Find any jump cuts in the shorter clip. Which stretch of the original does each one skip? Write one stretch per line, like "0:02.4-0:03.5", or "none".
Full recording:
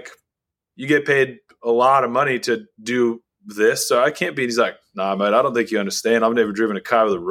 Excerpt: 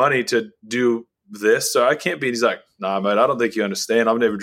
none